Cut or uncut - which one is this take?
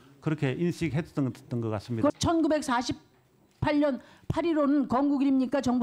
cut